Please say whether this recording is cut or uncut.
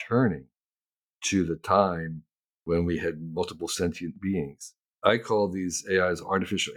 cut